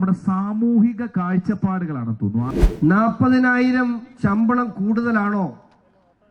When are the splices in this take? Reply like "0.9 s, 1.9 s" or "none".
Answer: 2.5 s